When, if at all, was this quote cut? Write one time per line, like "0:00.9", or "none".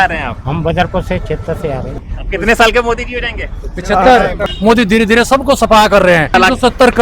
0:02.0
0:04.5
0:06.3